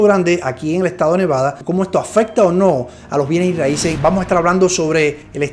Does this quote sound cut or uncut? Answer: cut